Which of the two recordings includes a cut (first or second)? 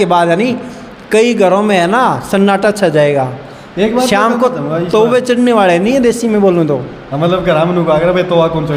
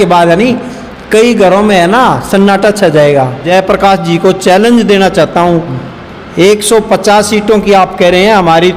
second